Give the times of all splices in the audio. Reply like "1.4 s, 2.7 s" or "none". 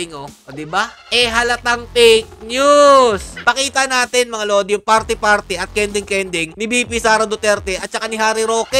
1.0 s, 3.3 s